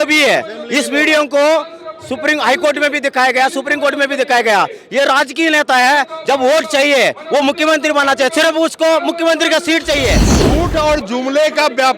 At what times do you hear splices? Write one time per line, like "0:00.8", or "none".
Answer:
0:10.3